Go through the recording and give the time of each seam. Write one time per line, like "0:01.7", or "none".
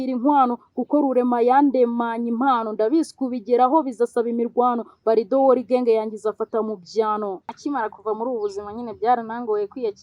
0:07.5